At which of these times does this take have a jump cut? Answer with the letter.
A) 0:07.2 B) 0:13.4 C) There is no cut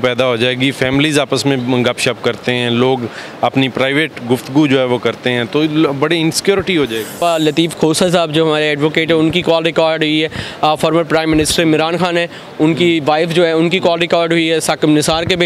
A